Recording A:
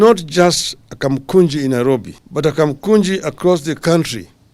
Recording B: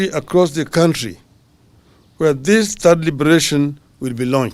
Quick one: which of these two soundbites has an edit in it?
A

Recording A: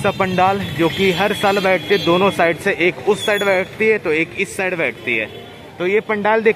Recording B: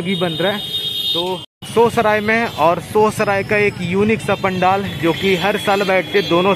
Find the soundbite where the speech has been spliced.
B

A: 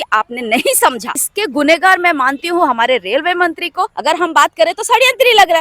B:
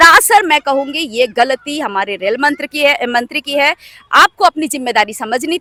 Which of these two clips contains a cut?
A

